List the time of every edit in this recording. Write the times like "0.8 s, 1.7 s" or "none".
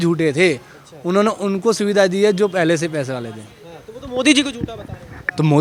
none

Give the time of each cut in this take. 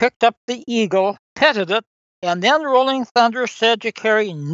1.2 s, 1.9 s

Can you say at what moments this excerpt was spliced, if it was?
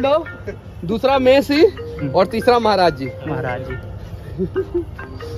none

